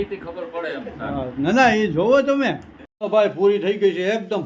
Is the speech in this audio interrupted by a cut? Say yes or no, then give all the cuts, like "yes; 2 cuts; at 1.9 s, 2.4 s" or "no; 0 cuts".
no; 0 cuts